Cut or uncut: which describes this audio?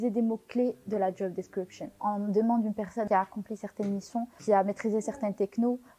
cut